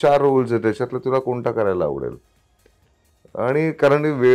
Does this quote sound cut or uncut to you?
uncut